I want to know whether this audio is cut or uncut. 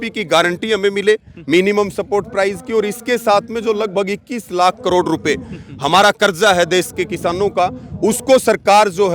uncut